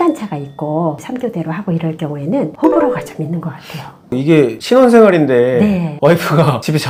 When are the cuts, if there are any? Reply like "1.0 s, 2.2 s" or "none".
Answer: none